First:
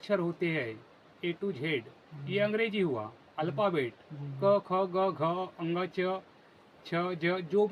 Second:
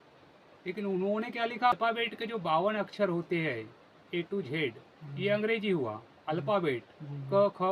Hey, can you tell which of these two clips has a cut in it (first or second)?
second